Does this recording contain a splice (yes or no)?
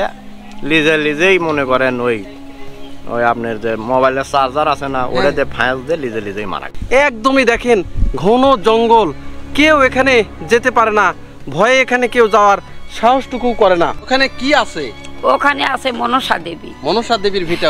yes